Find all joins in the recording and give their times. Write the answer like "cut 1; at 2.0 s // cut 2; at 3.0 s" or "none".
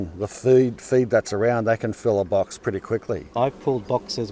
cut 1; at 3.3 s